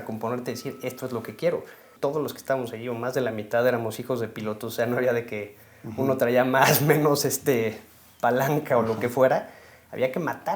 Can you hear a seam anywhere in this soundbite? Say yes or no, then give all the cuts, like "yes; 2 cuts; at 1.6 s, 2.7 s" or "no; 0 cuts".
yes; 1 cut; at 1.9 s